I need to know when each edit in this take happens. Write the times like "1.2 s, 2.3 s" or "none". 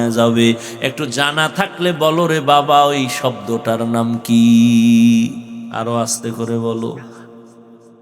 5.6 s